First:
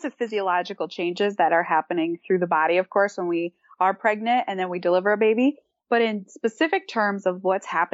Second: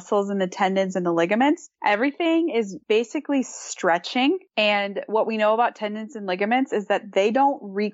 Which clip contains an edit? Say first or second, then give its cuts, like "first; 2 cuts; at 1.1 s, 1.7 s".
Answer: second; 3 cuts; at 1.7 s, 2.8 s, 4.5 s